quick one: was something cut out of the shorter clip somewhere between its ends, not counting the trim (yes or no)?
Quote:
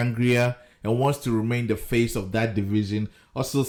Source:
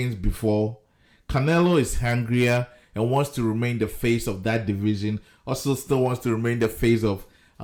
no